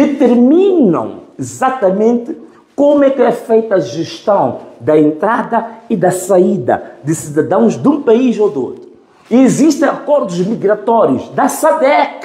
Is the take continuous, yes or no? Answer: yes